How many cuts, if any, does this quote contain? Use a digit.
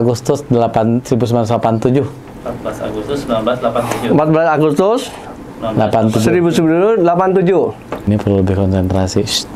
1